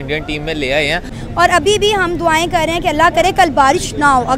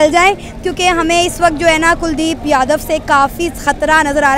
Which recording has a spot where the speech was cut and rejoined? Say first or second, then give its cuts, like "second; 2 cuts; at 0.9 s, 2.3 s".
first; 1 cut; at 1.2 s